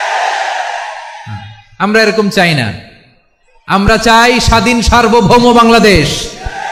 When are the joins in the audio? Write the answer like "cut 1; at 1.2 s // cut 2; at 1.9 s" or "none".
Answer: none

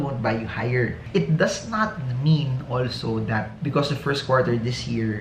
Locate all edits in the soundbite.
cut 1; at 1.0 s

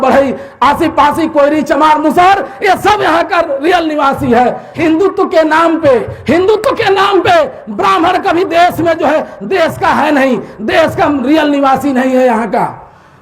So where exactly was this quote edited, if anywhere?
cut 1; at 4.7 s

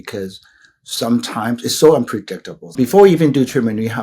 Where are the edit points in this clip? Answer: cut 1; at 2.7 s

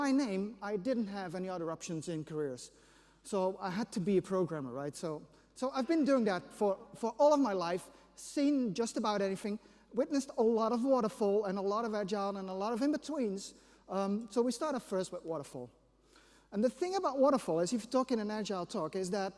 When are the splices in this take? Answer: none

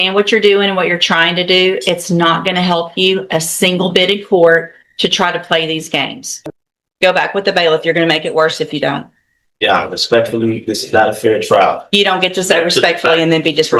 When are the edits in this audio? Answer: cut 1; at 6.3 s

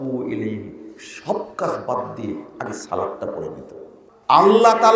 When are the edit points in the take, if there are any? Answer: cut 1; at 4.1 s

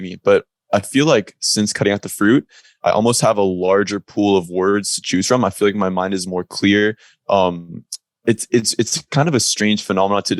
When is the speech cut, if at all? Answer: none

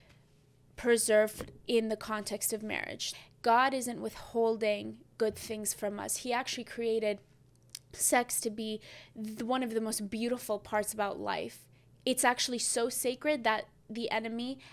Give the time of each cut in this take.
cut 1; at 3.0 s

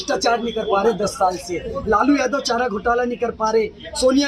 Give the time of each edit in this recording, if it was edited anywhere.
none

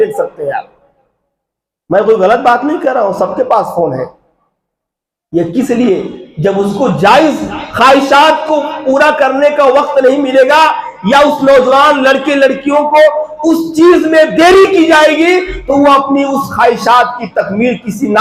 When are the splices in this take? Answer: none

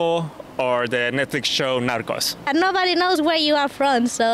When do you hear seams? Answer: cut 1; at 2.5 s

